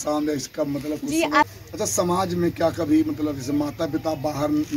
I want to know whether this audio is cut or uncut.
cut